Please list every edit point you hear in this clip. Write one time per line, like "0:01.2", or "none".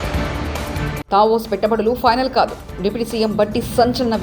0:01.0